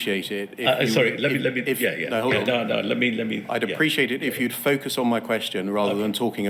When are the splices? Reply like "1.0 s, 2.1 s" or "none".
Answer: none